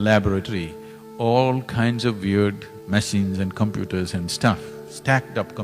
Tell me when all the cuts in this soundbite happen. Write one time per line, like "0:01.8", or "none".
0:02.7

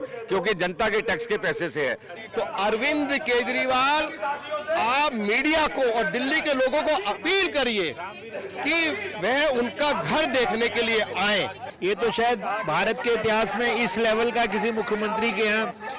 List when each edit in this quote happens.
0:02.1
0:11.6

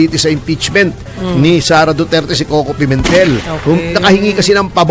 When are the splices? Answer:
none

